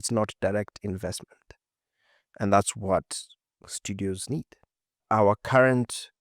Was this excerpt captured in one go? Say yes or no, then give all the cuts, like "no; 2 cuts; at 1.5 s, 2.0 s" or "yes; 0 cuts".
no; 1 cut; at 5.0 s